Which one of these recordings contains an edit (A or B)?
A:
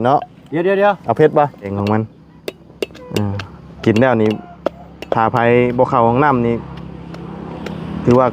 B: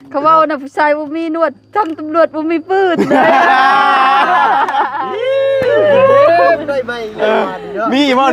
A